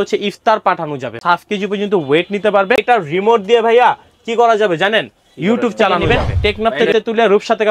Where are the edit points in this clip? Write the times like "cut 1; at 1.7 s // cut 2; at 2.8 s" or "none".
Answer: cut 1; at 1.2 s // cut 2; at 2.8 s // cut 3; at 6.0 s